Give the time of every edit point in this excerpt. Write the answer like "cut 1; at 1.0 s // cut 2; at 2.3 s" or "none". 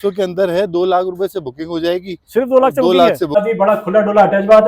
cut 1; at 3.3 s